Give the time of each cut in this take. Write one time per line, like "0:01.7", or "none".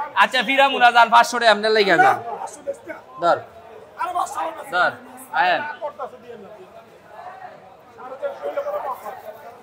none